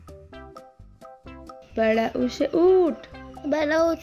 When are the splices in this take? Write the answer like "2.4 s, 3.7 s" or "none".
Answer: 2.0 s

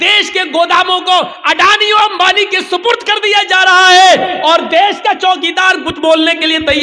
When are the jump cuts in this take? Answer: none

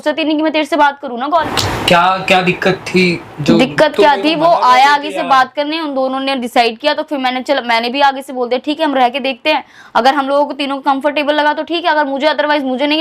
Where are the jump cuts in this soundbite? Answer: 1.5 s

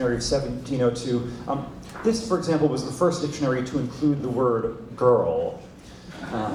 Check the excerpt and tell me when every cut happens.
none

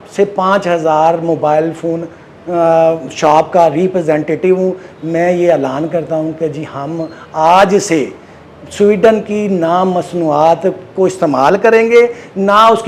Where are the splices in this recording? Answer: none

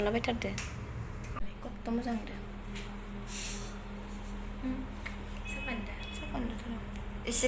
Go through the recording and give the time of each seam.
1.4 s

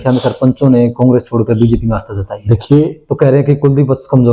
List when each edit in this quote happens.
none

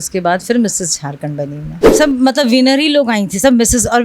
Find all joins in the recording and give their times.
1.8 s

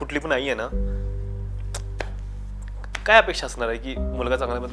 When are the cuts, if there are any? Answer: none

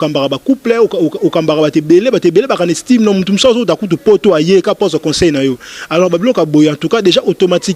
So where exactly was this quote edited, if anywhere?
none

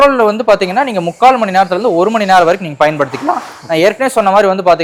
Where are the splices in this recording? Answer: none

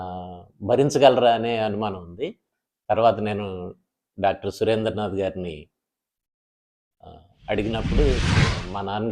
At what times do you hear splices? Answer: 8.2 s

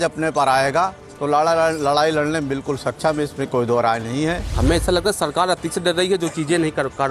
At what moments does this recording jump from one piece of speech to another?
4.5 s

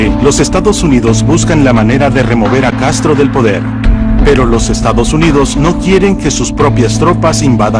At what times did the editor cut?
2.8 s

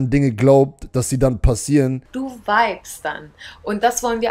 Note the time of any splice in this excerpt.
2.1 s

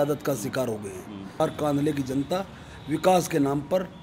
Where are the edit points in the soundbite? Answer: 1.4 s

